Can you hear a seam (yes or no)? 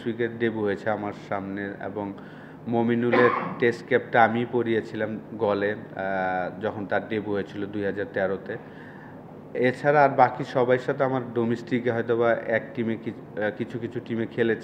no